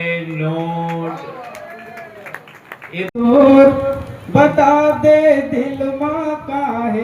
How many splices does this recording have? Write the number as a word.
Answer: one